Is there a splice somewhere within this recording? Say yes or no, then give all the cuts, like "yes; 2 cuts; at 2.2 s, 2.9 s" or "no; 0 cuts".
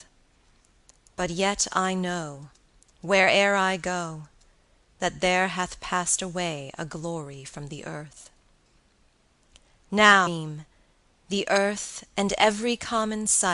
no; 0 cuts